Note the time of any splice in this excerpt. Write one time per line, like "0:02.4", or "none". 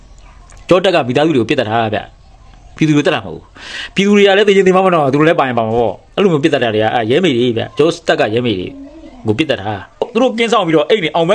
0:10.1